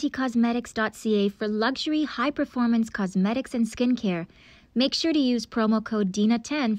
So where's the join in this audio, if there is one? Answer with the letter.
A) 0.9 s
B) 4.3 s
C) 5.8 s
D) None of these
D